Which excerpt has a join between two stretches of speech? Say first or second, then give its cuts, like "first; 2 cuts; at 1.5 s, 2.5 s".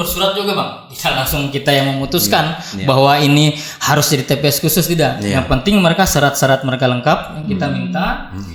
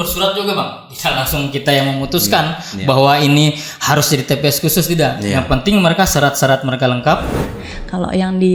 second; 1 cut; at 7.4 s